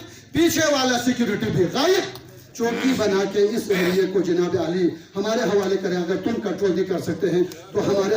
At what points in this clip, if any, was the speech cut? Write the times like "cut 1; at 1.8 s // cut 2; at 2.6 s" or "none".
cut 1; at 2.4 s